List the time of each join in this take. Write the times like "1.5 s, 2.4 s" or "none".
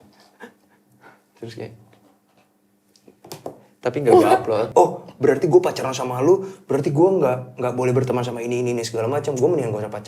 4.7 s